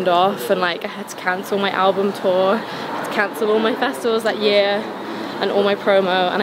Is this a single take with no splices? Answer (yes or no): yes